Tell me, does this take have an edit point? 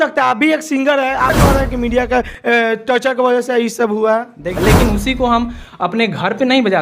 yes; 2 cuts; at 1.3 s, 4.6 s

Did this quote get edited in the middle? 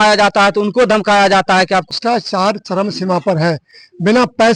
yes; 1 cut; at 1.9 s

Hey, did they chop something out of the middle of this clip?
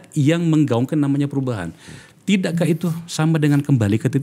no; 0 cuts

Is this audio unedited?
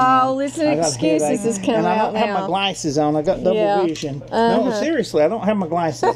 yes; 0 cuts

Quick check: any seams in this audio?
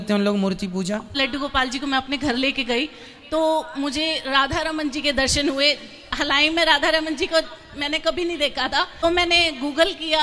yes; 2 cuts; at 1.2 s, 8.9 s

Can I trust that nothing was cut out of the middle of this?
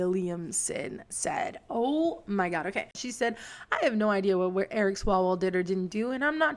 no; 1 cut; at 3.0 s

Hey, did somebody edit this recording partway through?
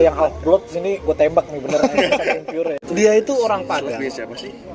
yes; 1 cut; at 2.8 s

